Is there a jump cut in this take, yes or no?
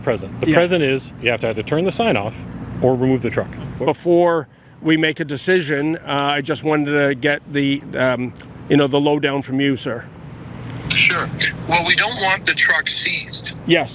no